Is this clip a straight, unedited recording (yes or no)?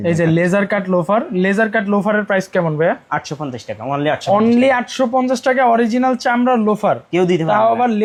yes